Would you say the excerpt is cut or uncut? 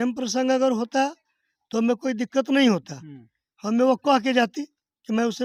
uncut